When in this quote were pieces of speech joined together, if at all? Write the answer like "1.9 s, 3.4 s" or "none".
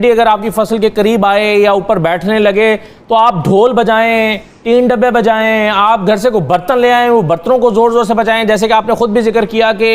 none